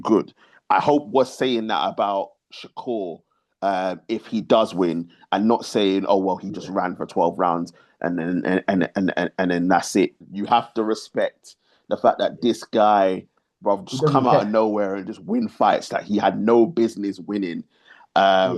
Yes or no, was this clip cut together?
yes